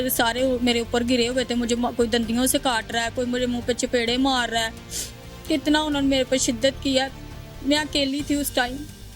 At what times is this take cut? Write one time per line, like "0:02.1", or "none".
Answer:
none